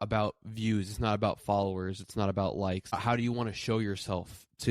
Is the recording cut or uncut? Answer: cut